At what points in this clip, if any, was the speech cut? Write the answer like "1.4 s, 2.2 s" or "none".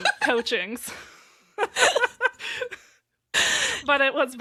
none